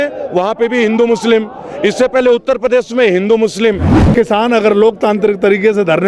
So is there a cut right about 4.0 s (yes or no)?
yes